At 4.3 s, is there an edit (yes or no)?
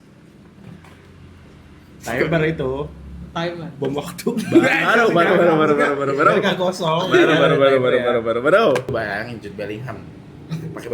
no